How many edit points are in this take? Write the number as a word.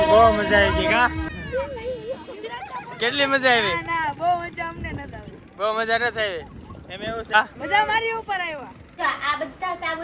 three